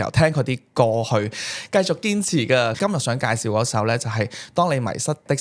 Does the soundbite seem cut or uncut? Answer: cut